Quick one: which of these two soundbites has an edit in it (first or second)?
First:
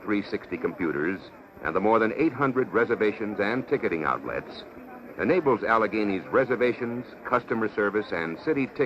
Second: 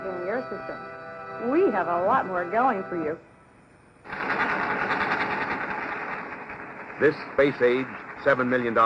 second